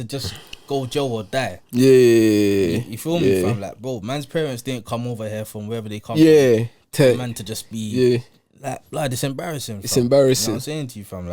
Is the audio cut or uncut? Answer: uncut